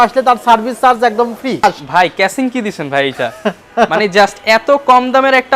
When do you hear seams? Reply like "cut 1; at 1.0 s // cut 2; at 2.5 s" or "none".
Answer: cut 1; at 1.6 s

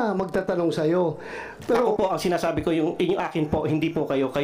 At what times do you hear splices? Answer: cut 1; at 1.9 s

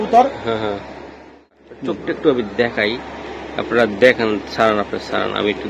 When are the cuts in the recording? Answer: cut 1; at 1.6 s

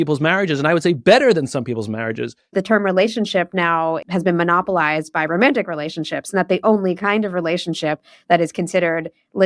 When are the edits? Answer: cut 1; at 2.5 s // cut 2; at 4.0 s

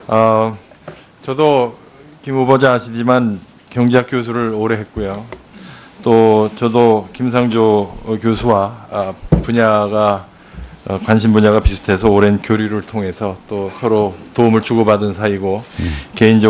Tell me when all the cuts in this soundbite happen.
none

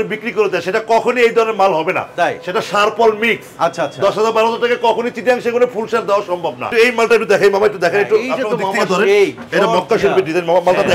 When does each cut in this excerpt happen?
cut 1; at 6.7 s

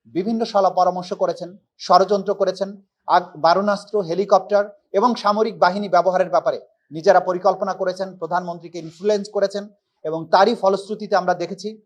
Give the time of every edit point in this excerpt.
none

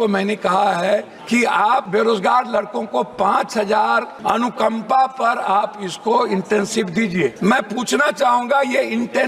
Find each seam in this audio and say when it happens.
cut 1; at 1.6 s // cut 2; at 4.1 s // cut 3; at 7.4 s

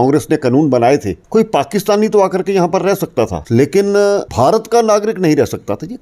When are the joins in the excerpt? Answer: cut 1; at 1.2 s // cut 2; at 3.4 s // cut 3; at 4.3 s

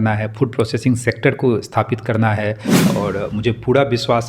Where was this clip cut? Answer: cut 1; at 2.9 s

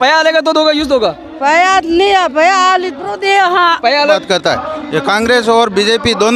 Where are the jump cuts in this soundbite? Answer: cut 1; at 4.2 s

